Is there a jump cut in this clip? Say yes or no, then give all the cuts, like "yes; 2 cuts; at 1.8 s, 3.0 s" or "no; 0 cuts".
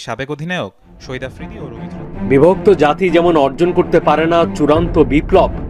yes; 1 cut; at 1.6 s